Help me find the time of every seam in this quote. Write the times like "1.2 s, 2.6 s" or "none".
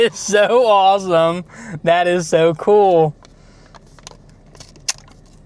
none